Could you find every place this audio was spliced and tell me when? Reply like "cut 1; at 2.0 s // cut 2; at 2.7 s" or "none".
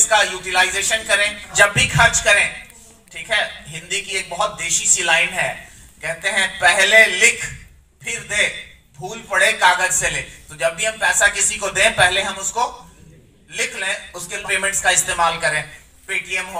cut 1; at 1.5 s // cut 2; at 14.4 s